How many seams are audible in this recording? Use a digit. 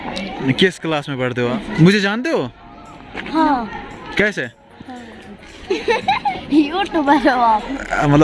1